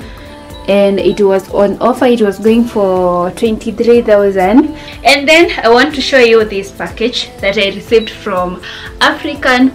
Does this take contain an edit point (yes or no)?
yes